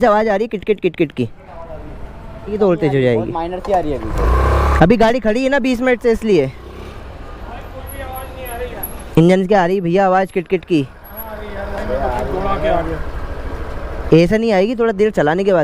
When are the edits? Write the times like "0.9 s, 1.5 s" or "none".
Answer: 2.5 s, 7.2 s